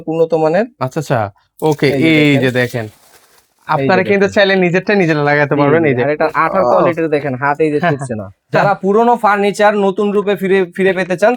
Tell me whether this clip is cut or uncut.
cut